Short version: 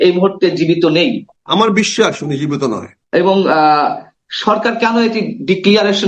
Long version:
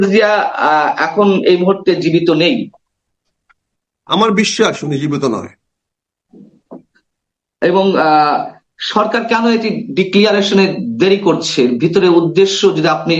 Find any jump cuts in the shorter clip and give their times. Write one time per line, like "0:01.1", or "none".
0:01.3
0:02.9